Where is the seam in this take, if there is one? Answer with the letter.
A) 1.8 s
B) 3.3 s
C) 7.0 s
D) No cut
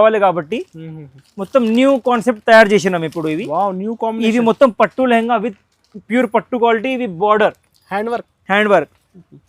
D